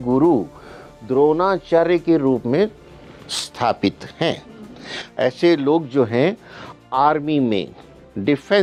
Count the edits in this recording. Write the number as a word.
zero